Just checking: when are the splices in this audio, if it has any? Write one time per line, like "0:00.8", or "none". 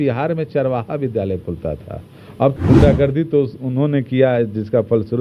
0:02.5